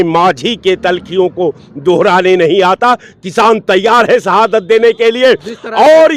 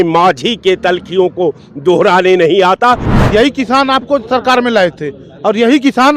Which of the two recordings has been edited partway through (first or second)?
second